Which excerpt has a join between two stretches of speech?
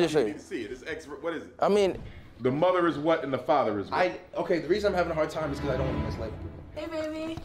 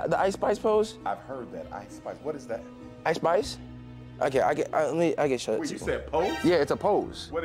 first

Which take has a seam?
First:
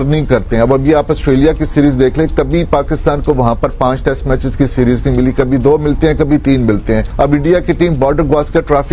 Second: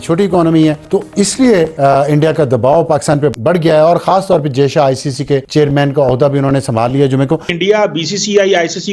second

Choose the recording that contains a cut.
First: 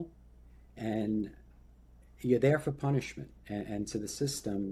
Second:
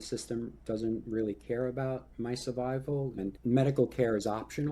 second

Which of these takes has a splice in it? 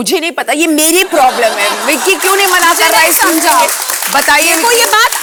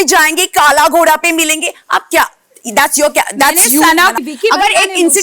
second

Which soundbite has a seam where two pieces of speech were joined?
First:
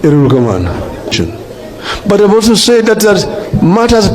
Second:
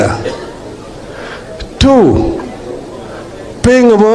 first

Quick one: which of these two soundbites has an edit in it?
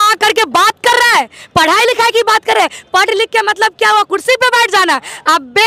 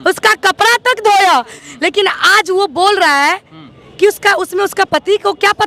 second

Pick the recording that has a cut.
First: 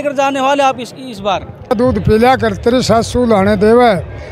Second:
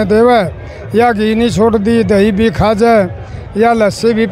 first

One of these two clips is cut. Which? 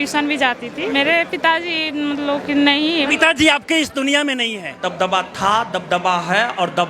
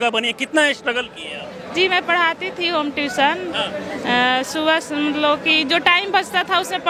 first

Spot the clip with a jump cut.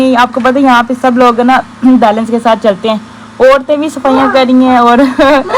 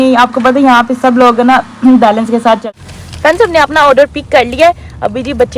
second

